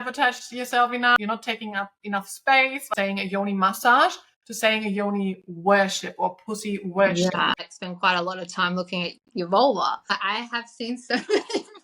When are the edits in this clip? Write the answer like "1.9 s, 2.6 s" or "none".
1.2 s, 2.9 s, 7.7 s, 10.2 s